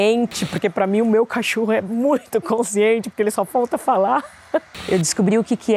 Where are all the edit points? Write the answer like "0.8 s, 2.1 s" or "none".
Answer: 4.7 s

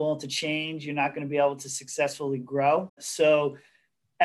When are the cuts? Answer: 3.0 s

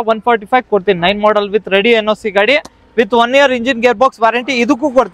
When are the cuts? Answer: none

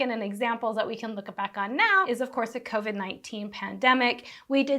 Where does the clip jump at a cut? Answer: 2.1 s

